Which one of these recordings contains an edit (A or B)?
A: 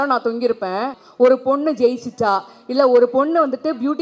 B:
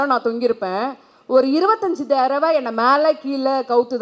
A